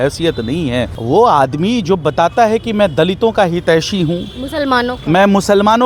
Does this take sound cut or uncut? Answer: cut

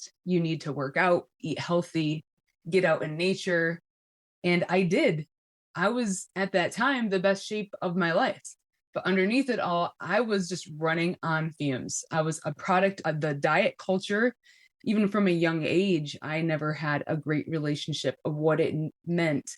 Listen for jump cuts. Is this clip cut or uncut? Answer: cut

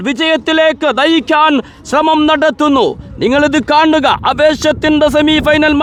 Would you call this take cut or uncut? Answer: uncut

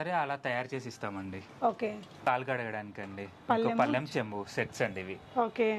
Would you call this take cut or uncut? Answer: cut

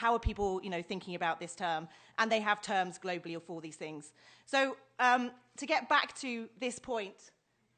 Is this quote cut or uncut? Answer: uncut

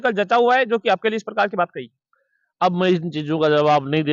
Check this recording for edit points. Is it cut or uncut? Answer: uncut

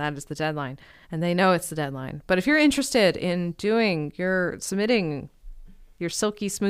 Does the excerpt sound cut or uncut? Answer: uncut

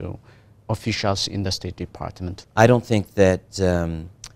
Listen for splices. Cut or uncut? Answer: cut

